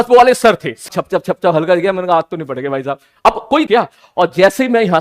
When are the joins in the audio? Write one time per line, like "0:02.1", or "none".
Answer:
0:00.9
0:03.7